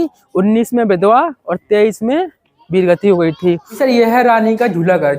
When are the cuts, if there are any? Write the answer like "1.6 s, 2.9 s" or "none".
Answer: 3.8 s